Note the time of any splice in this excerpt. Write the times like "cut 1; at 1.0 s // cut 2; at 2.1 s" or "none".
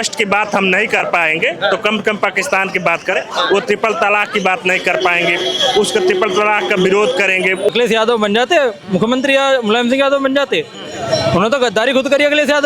cut 1; at 7.7 s